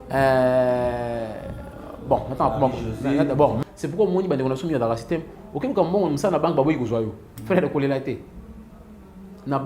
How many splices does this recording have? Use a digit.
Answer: 1